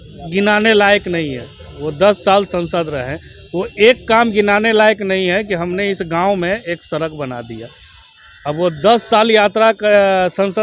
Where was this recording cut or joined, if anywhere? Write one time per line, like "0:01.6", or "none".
none